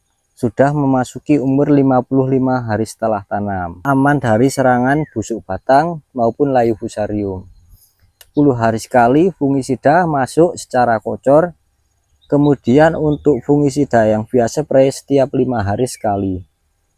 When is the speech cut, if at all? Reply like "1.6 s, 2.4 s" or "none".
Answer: 3.8 s, 8.2 s